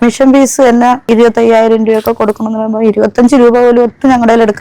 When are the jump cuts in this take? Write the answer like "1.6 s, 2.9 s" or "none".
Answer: 1.1 s